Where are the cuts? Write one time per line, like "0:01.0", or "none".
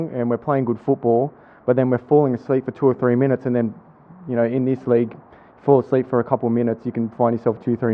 none